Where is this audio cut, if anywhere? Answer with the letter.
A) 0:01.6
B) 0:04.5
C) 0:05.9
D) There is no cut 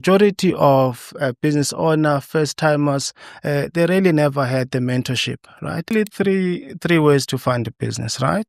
C